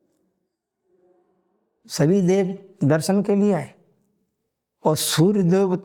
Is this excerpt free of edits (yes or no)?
yes